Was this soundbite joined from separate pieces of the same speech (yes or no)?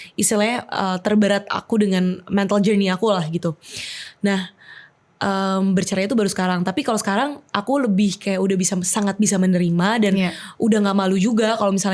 no